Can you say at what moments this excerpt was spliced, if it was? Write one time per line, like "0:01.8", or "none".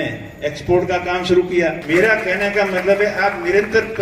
0:01.8